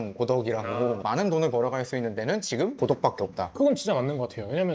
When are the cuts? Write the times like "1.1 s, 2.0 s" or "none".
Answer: 1.0 s